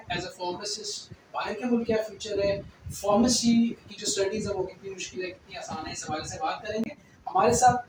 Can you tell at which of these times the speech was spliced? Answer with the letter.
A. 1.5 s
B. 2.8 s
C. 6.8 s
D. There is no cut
D